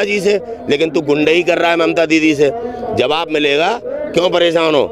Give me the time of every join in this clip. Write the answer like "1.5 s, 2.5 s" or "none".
none